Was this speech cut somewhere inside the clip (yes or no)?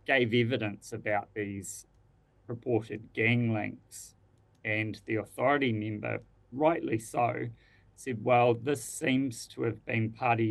no